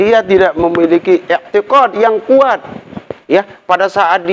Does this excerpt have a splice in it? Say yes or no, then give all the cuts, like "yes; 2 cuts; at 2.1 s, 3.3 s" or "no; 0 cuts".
no; 0 cuts